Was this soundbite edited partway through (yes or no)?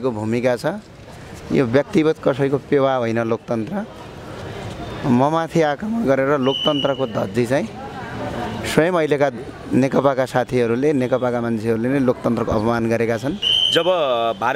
yes